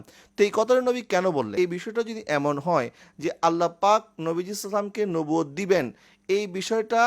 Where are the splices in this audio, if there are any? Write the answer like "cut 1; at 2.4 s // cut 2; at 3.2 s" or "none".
cut 1; at 1.5 s

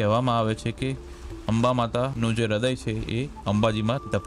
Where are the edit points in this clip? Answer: none

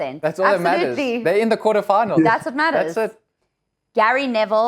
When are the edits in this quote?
cut 1; at 3.3 s

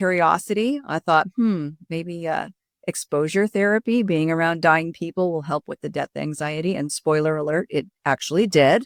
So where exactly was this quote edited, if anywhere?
none

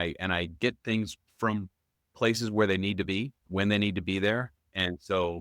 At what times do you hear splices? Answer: cut 1; at 1.2 s // cut 2; at 3.4 s

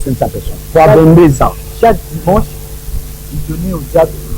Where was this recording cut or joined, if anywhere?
none

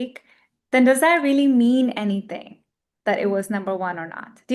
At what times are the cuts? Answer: none

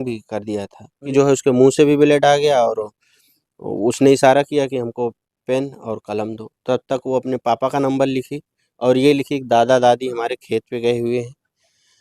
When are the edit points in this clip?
cut 1; at 1.1 s

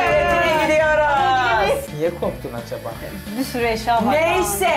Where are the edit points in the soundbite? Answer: cut 1; at 1.9 s

